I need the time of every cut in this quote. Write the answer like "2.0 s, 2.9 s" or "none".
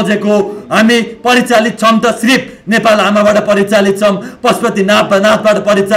none